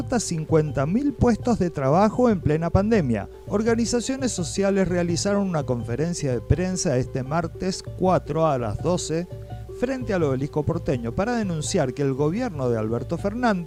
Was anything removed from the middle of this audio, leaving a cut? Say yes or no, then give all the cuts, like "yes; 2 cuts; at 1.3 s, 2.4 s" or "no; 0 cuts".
no; 0 cuts